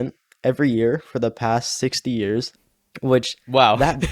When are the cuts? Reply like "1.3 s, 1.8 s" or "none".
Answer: 2.5 s